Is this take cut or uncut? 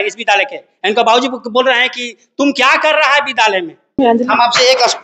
cut